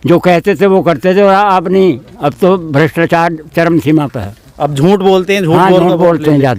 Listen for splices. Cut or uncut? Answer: uncut